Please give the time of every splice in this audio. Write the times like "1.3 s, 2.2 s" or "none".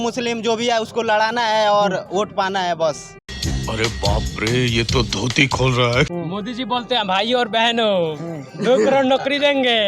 none